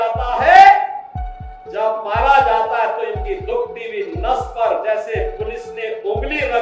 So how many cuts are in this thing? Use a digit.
0